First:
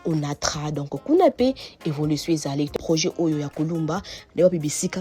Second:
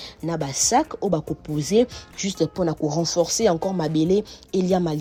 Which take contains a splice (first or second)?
first